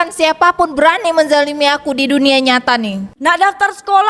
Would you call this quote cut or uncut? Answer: cut